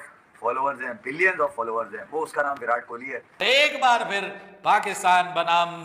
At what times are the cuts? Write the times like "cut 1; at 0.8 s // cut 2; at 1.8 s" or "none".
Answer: cut 1; at 3.4 s